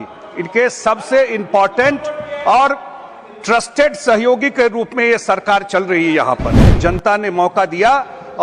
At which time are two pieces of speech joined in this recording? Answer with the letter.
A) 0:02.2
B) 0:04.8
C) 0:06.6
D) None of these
C